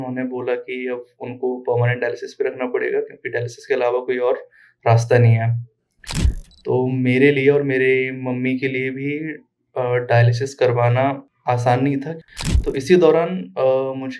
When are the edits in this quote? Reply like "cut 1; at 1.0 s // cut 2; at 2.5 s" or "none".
cut 1; at 12.2 s